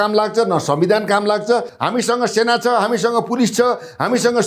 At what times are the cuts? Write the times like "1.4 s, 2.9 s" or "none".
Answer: 1.8 s

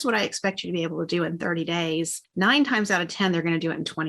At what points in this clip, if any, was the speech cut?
2.2 s

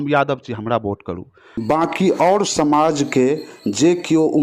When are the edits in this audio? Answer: 1.6 s

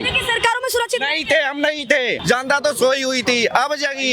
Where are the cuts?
2.2 s

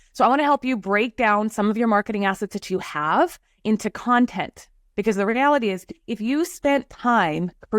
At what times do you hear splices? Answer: none

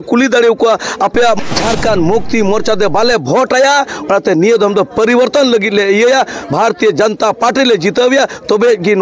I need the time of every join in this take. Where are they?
1.4 s

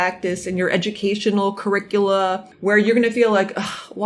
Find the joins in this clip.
2.5 s

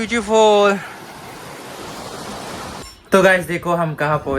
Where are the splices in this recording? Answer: 2.9 s

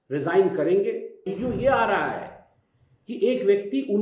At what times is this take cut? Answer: 1.3 s

